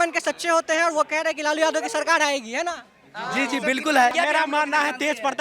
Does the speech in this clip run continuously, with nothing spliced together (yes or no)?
no